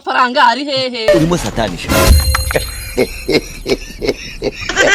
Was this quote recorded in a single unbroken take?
yes; 0 cuts

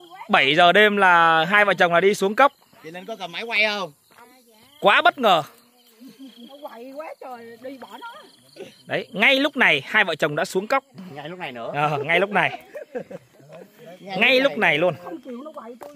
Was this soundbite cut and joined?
no; 0 cuts

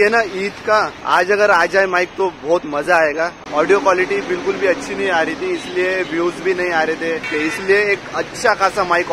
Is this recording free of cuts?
no; 3 cuts; at 1.0 s, 3.4 s, 7.3 s

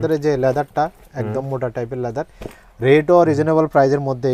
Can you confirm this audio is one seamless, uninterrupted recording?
yes; 0 cuts

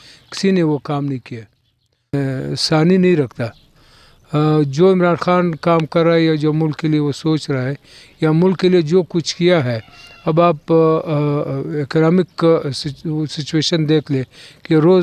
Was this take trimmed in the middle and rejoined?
yes; 1 cut; at 2.1 s

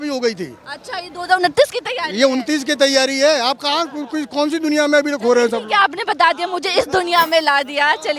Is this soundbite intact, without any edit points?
yes; 0 cuts

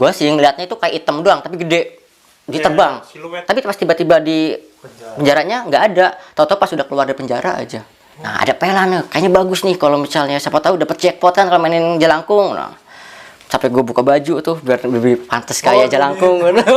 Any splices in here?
yes; 2 cuts; at 3.4 s, 8.3 s

